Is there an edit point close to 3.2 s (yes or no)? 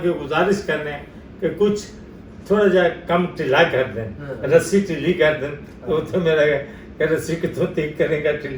no